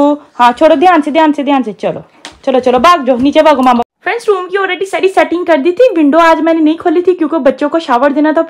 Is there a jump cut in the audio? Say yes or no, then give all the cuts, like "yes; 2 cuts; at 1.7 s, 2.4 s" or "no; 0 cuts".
no; 0 cuts